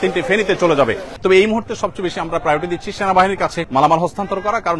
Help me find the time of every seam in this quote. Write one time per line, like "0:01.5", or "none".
0:01.1
0:03.6